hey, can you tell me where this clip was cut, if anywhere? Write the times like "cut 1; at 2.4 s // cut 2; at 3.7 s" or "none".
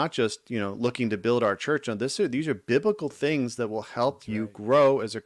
none